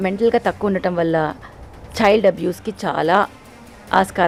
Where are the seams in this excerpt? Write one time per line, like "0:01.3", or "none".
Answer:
none